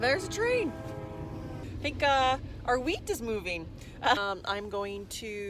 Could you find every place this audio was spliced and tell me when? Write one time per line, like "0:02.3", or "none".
0:01.6
0:04.2